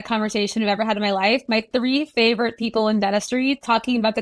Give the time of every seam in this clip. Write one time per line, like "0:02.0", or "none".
none